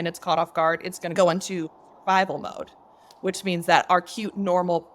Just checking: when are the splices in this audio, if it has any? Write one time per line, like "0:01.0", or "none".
0:01.1